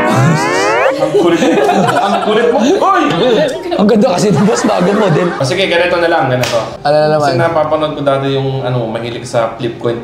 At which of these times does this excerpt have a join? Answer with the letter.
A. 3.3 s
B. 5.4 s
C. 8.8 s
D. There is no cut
B